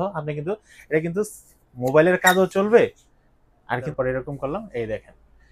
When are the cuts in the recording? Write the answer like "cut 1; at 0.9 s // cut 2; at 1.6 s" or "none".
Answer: cut 1; at 3.9 s